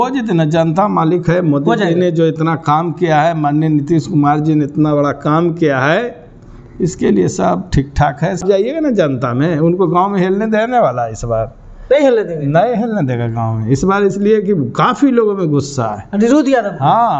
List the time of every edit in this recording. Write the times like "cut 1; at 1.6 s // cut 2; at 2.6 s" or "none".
cut 1; at 8.4 s